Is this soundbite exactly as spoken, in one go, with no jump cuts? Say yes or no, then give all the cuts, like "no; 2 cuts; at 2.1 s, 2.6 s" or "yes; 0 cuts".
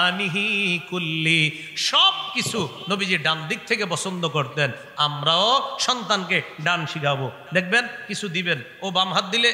yes; 0 cuts